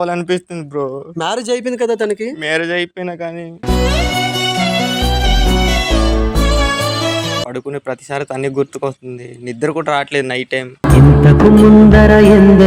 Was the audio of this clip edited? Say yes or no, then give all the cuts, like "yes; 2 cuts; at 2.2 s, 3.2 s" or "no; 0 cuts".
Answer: yes; 1 cut; at 7.4 s